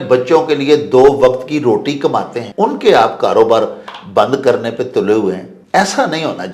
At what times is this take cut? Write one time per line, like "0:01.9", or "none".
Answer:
0:02.4
0:05.5

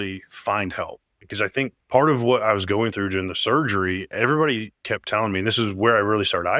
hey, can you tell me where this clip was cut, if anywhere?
none

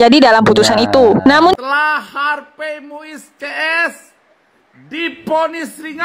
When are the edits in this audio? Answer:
0:01.5

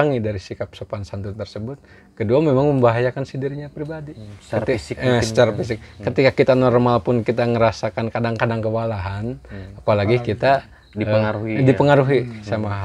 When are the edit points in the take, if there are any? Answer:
none

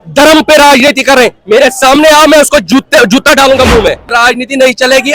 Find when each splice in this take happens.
0:04.1

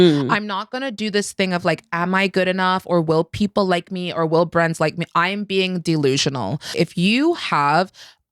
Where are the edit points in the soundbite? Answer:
0:06.7

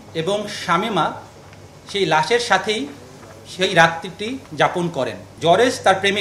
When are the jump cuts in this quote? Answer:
0:05.2

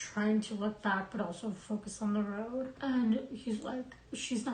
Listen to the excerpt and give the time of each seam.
0:02.7

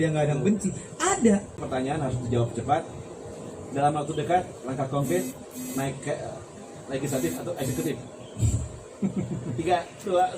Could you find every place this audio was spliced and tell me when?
0:01.6

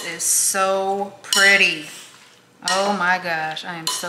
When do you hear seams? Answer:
none

